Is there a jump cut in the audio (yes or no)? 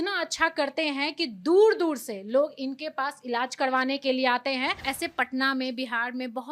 yes